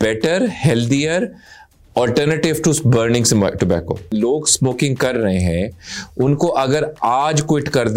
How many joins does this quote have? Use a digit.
1